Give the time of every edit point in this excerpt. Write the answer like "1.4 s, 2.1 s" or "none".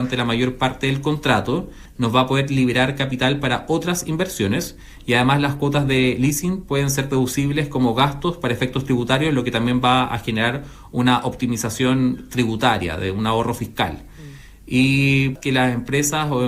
1.8 s, 15.3 s